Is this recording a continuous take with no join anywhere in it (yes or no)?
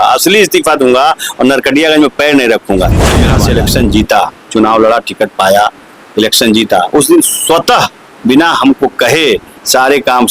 no